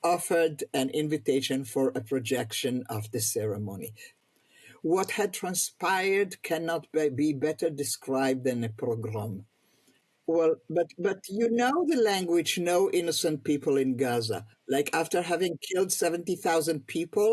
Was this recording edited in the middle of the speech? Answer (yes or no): yes